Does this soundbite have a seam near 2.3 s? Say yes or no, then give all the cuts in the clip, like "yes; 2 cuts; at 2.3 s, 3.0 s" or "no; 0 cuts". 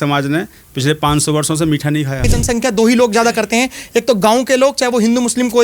yes; 1 cut; at 2.3 s